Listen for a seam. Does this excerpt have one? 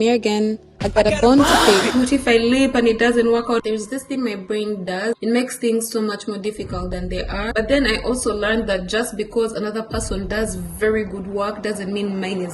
yes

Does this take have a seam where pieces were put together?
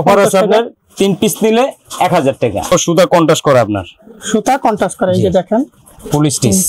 yes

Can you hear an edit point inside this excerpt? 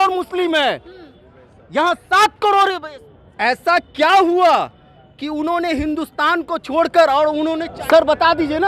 yes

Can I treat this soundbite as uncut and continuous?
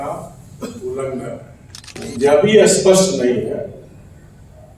no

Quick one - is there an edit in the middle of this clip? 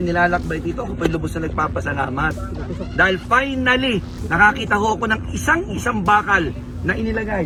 no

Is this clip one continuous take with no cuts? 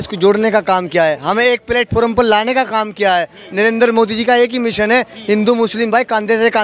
yes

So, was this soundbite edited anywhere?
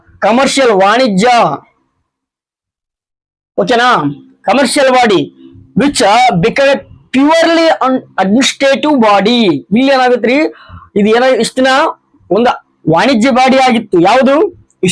no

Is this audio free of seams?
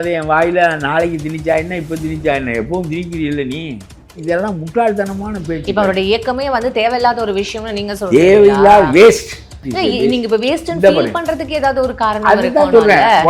no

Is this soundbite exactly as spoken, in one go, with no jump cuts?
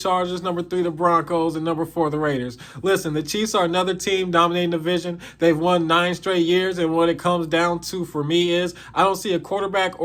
yes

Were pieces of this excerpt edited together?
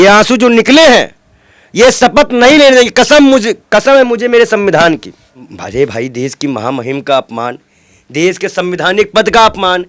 yes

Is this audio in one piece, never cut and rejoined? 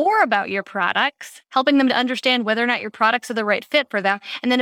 yes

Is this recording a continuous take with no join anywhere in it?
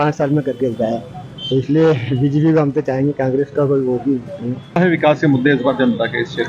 yes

